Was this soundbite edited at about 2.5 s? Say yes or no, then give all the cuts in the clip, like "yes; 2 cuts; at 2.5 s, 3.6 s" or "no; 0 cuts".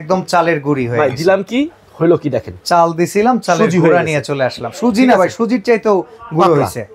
no; 0 cuts